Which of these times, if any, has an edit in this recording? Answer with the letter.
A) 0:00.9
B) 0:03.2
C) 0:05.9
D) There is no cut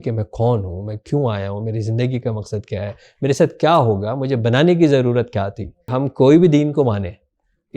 C